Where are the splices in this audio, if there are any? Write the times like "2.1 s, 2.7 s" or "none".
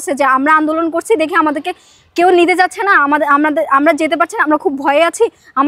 none